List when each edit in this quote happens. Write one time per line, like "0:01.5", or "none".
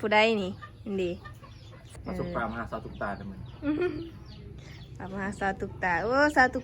0:01.8